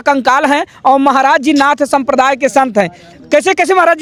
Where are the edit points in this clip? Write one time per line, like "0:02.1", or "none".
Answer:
none